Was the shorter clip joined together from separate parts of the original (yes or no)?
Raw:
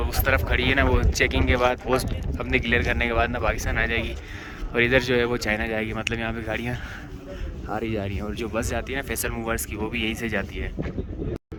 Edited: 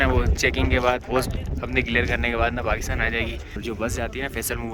yes